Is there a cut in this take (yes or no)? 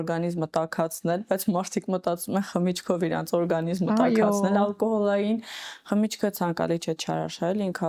no